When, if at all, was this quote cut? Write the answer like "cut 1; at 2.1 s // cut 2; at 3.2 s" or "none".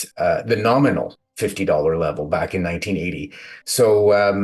none

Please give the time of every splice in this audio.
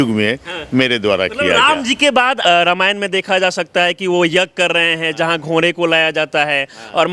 none

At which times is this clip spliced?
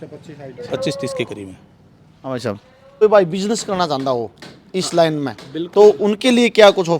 cut 1; at 3.0 s

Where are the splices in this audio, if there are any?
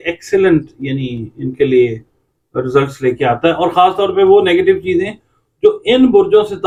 none

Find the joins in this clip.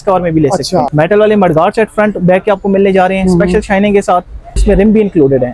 cut 1; at 0.9 s // cut 2; at 4.6 s

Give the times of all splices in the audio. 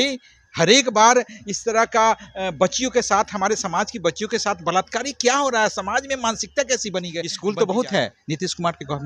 cut 1; at 7.2 s

